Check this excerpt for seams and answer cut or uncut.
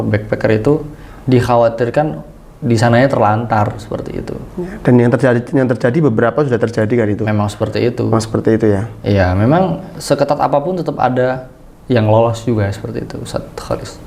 uncut